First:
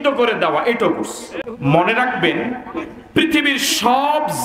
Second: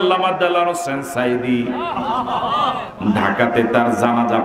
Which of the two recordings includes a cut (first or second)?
first